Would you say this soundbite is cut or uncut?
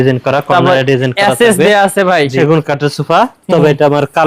cut